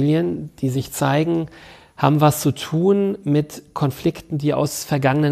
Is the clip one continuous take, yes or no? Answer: yes